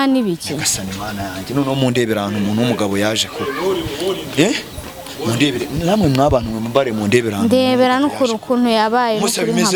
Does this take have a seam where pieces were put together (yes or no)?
no